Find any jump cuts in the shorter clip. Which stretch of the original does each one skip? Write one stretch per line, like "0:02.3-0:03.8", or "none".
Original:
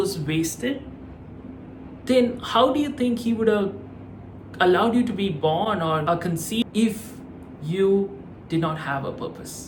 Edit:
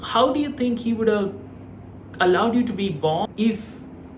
0:05.7-0:06.6